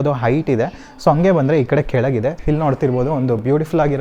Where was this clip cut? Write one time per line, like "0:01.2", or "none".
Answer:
0:02.4